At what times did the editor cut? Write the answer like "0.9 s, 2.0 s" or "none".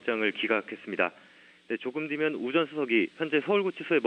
1.1 s